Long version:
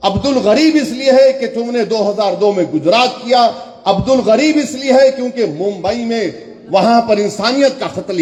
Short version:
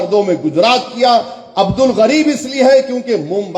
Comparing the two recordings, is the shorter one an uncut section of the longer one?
yes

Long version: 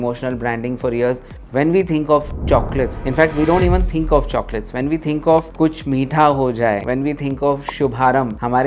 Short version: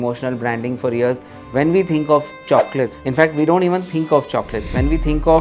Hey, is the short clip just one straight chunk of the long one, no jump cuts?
yes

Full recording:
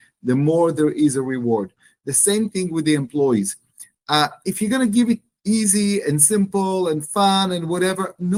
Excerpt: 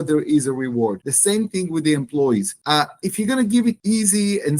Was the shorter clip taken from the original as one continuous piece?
no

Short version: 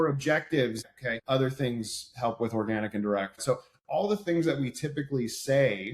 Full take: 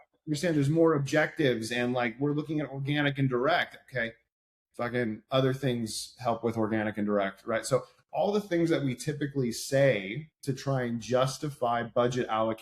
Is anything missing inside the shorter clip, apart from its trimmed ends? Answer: yes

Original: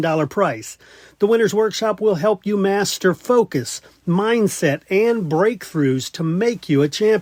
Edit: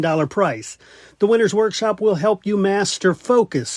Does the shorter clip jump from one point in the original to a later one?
no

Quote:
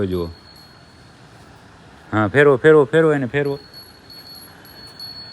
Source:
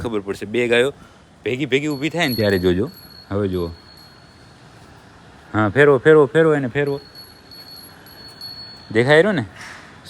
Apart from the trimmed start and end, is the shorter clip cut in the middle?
no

